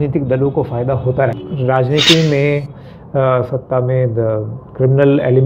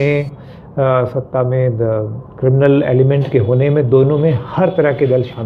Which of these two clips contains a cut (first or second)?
first